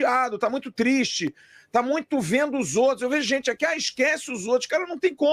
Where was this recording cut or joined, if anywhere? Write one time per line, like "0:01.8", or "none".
none